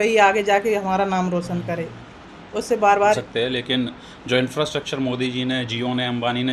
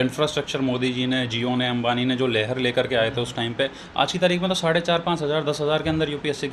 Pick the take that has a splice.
first; 1 cut; at 3.2 s

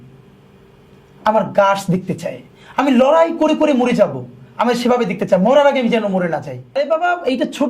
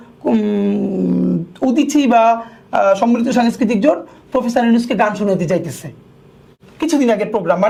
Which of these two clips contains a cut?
first; 1 cut; at 6.6 s

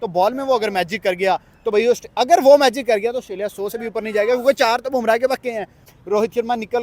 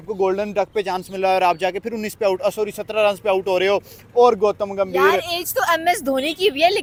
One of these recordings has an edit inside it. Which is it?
first; 1 cut; at 5.8 s

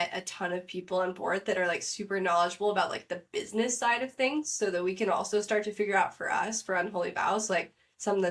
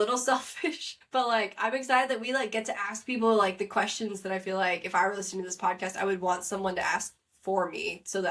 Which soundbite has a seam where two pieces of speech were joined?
second; 1 cut; at 0.9 s

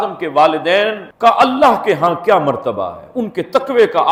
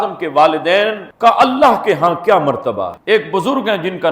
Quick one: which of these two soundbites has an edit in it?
second; 1 cut; at 3.0 s

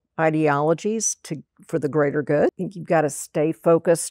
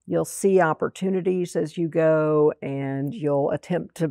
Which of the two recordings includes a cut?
first; 1 cut; at 2.7 s

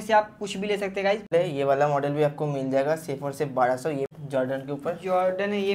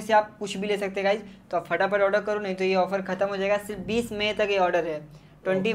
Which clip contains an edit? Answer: first; 2 cuts; at 1.3 s, 4.1 s

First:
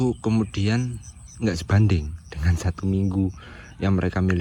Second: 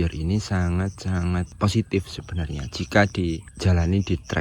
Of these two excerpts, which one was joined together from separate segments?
second; 2 cuts; at 1.5 s, 3.5 s

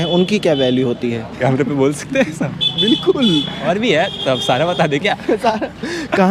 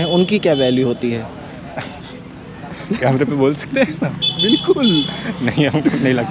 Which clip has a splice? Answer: first; 2 cuts; at 1.4 s, 3.6 s

